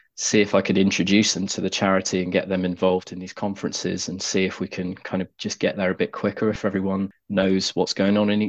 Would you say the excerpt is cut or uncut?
cut